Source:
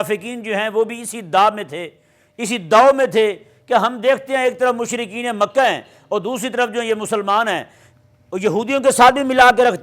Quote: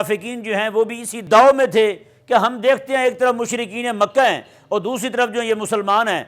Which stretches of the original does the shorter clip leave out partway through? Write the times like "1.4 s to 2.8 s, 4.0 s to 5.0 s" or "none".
1.2 s to 2.6 s